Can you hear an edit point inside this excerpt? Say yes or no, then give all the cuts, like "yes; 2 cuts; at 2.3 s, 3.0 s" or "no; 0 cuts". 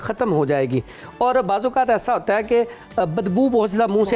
no; 0 cuts